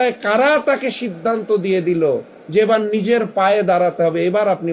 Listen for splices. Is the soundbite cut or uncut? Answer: uncut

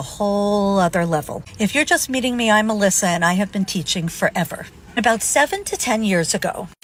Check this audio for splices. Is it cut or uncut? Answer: uncut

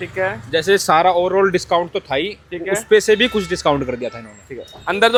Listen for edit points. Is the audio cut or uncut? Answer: uncut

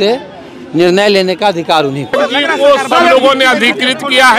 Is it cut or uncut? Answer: cut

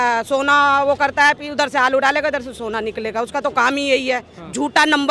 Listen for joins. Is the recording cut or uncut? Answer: uncut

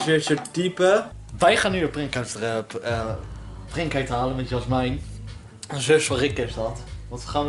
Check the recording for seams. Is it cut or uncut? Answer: cut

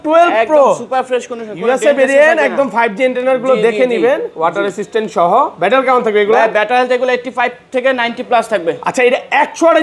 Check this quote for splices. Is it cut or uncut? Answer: uncut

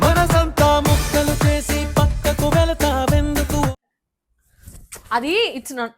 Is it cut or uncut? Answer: cut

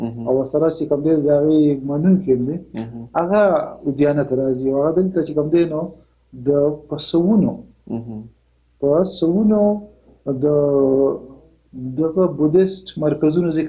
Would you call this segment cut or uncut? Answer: uncut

